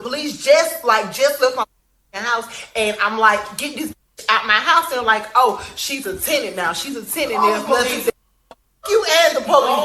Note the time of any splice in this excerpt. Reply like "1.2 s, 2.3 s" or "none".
1.1 s, 5.4 s

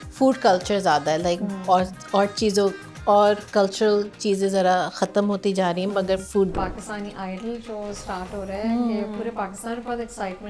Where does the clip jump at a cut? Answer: 6.5 s

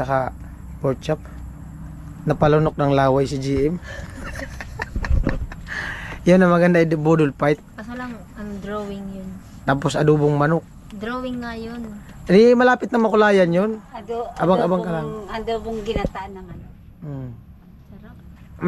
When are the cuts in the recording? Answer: none

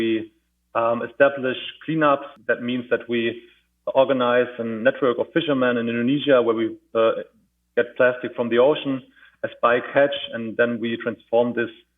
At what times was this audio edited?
2.3 s

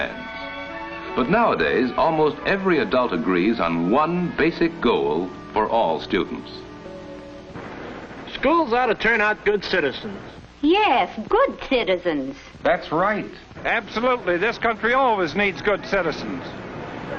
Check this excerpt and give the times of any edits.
10.9 s

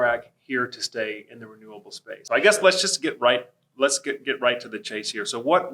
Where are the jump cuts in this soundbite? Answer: 2.2 s

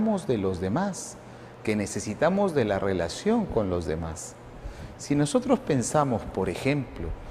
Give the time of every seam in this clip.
4.2 s

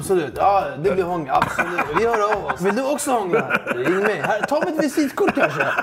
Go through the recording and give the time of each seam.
1.9 s, 2.6 s

